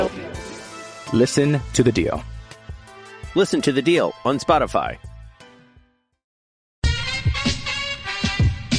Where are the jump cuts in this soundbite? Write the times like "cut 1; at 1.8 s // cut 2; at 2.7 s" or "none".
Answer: cut 1; at 6.7 s